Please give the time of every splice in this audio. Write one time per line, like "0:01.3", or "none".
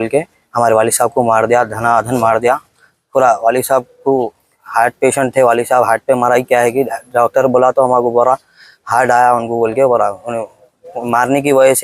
none